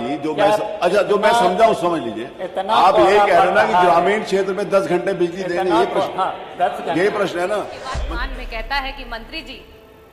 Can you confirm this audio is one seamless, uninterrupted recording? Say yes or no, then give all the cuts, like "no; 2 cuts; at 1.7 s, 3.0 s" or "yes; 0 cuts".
no; 1 cut; at 7.9 s